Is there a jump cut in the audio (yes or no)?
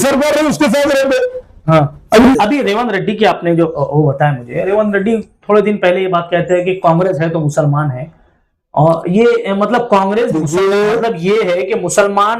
yes